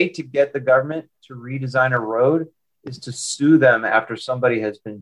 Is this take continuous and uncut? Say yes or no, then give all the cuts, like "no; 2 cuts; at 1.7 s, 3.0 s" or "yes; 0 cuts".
yes; 0 cuts